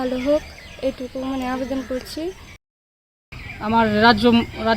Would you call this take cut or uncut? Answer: cut